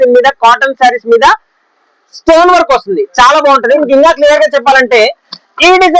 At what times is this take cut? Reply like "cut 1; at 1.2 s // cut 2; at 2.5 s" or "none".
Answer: cut 1; at 3.8 s

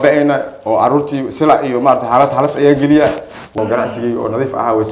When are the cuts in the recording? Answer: cut 1; at 3.5 s

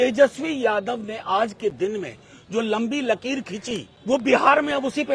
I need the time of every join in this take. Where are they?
cut 1; at 3.9 s

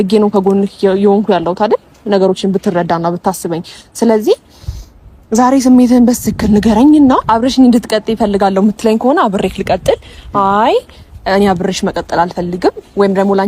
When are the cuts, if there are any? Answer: cut 1; at 7.2 s

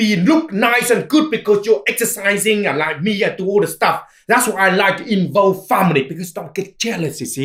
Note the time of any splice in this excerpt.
none

